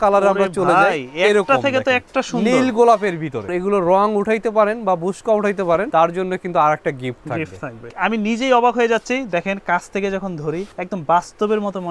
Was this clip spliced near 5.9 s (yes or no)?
yes